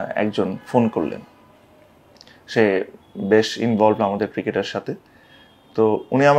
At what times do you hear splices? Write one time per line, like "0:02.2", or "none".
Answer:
none